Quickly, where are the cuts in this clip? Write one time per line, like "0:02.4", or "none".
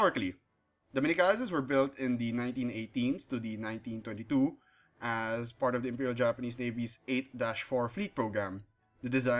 none